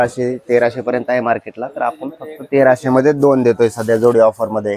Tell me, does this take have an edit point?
no; 0 cuts

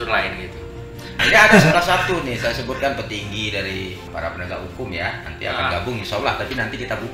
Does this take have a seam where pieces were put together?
yes; 2 cuts; at 1.1 s, 4.0 s

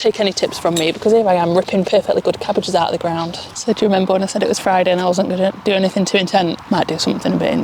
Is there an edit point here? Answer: yes; 2 cuts; at 3.4 s, 6.6 s

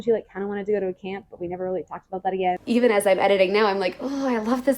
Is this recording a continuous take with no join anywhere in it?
no; 1 cut; at 2.6 s

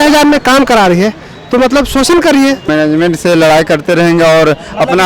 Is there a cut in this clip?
yes; 1 cut; at 2.7 s

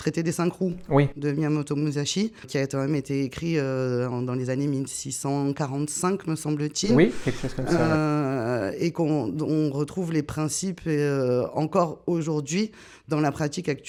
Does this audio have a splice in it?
no; 0 cuts

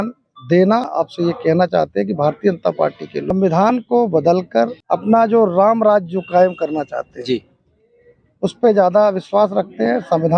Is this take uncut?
no; 3 cuts; at 0.9 s, 3.3 s, 4.8 s

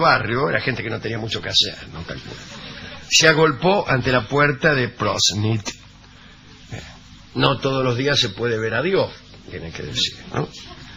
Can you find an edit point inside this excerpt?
yes; 1 cut; at 4.7 s

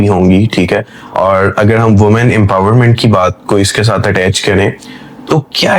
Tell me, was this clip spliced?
no; 0 cuts

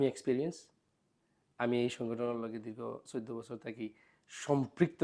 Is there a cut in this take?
no; 0 cuts

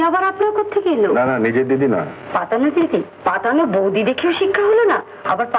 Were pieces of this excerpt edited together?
yes; 1 cut; at 3.1 s

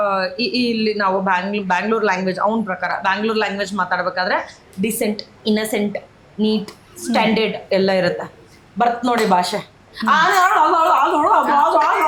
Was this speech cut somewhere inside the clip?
no; 0 cuts

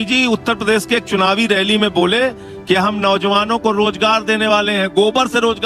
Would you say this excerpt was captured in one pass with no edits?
yes; 0 cuts

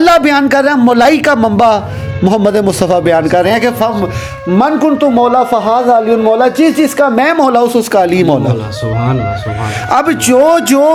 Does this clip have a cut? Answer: no; 0 cuts

